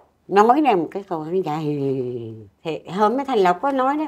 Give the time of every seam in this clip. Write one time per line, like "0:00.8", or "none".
0:02.1